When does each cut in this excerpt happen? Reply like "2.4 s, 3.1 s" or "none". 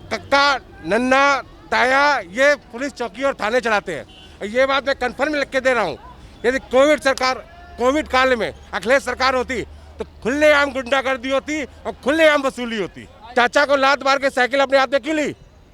13.1 s